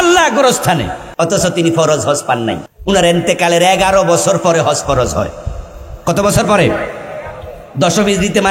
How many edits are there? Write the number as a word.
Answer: two